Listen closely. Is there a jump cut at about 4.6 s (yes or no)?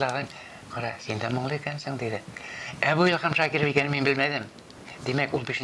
no